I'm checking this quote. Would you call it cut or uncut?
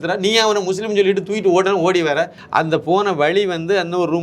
cut